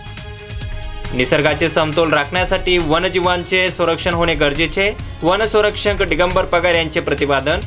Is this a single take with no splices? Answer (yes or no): yes